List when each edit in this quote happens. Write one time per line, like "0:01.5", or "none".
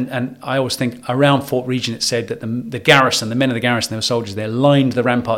none